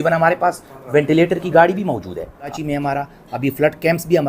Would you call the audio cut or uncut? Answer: cut